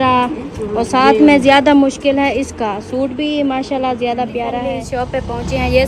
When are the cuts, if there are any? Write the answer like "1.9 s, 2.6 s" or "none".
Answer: 4.6 s